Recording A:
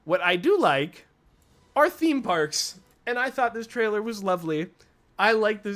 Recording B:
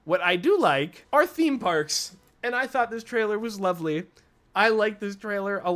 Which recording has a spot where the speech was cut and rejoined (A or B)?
B